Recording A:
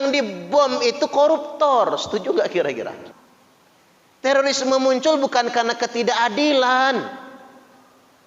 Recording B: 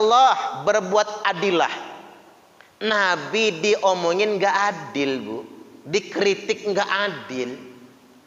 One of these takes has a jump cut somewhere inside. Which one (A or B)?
A